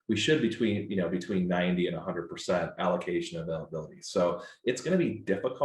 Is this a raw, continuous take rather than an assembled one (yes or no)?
yes